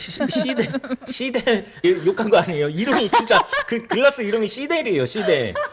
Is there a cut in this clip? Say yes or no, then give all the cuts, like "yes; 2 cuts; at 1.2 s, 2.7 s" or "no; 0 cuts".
yes; 1 cut; at 1.8 s